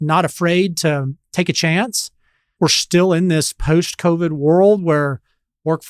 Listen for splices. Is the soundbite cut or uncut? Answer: cut